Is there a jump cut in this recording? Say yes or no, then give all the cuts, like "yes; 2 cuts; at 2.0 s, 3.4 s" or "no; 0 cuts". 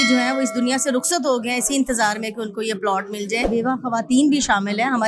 yes; 1 cut; at 3.5 s